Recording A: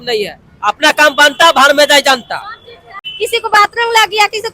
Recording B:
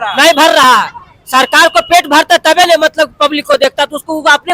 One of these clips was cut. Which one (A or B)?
A